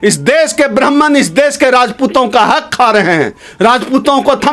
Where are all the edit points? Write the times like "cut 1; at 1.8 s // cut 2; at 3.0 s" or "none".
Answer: none